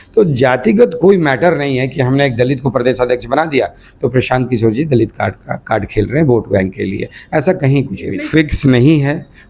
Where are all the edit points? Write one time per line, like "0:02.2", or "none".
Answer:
0:08.1